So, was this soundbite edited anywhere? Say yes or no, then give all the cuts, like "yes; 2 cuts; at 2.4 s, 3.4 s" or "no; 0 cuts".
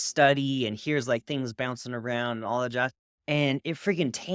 no; 0 cuts